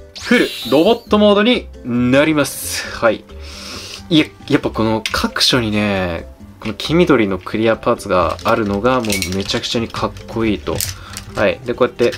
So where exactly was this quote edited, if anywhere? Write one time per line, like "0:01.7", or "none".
none